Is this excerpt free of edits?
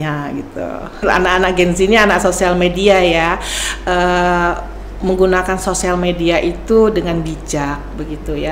no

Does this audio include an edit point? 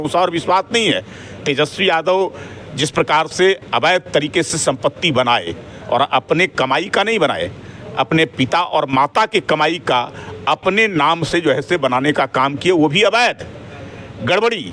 no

